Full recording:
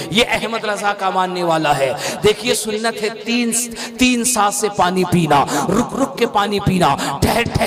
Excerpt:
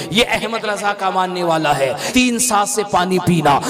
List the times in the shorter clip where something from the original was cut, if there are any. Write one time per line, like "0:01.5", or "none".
0:02.0